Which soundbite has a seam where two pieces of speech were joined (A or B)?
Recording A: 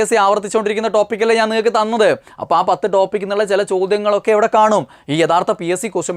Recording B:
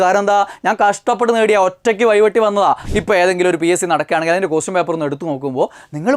B